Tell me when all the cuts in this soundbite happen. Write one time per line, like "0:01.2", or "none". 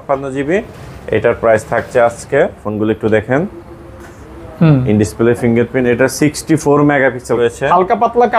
0:02.6
0:07.3

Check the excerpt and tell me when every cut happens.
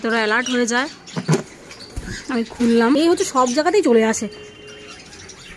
0:03.0

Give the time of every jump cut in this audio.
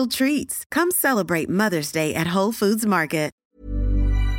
0:03.4

